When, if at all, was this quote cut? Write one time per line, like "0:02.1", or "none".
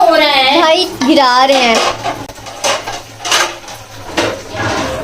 none